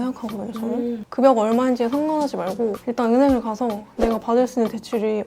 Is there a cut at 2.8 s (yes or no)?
yes